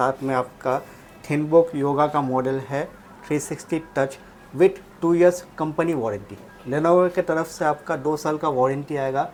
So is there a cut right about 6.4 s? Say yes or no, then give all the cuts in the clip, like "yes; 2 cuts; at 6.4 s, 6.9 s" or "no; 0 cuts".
no; 0 cuts